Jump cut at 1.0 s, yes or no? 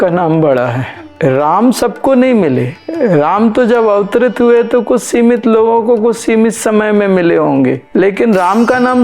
yes